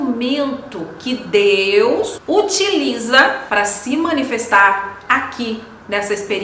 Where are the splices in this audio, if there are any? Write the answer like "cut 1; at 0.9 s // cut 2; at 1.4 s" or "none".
cut 1; at 2.2 s // cut 2; at 3.4 s